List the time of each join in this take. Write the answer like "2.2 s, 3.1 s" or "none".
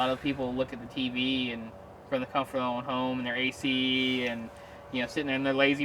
none